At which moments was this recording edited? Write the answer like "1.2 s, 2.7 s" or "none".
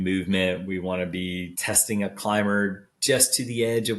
1.5 s